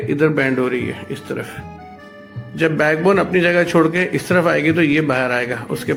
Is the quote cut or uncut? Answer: uncut